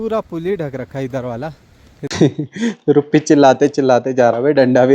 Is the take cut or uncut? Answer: cut